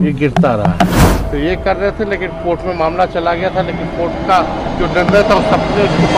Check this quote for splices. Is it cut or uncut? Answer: cut